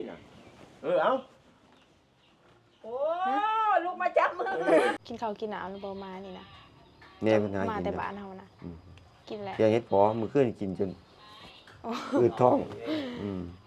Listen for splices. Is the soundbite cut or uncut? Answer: cut